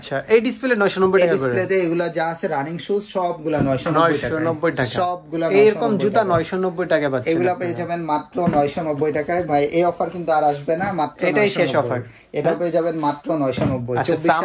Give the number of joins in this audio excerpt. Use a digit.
0